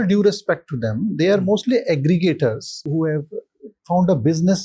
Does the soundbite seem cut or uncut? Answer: cut